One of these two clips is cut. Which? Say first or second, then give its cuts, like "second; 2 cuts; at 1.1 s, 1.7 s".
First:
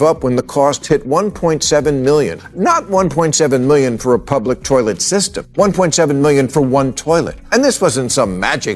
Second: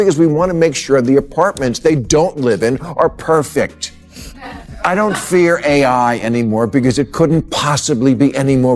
first; 3 cuts; at 2.4 s, 5.4 s, 7.4 s